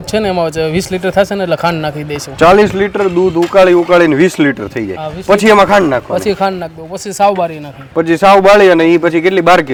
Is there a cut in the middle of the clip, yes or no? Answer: no